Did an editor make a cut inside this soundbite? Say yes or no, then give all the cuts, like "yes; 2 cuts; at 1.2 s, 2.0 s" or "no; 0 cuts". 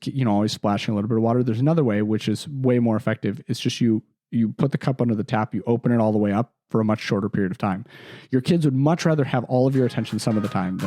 no; 0 cuts